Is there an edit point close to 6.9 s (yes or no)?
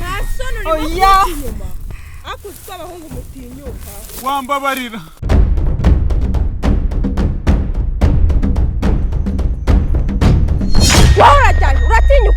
no